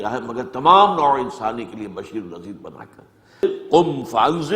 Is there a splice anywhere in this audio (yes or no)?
yes